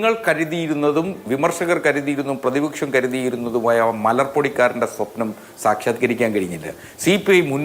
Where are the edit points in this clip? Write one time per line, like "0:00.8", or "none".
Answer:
none